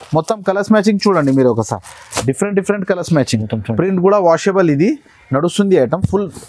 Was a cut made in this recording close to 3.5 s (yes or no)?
yes